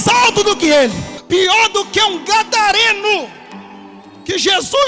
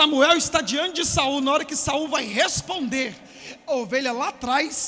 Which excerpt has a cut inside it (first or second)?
first